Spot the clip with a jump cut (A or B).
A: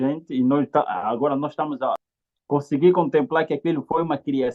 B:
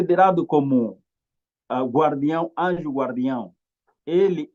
A